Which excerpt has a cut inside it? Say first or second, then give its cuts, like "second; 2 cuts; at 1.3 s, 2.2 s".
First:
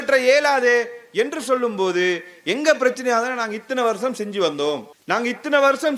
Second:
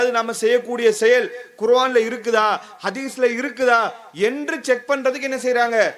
first; 1 cut; at 4.9 s